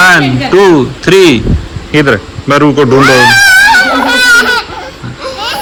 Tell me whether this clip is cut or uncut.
uncut